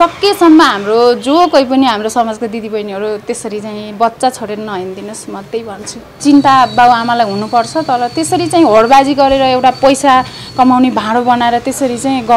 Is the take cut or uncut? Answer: cut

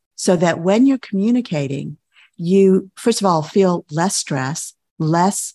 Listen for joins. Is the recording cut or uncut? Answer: uncut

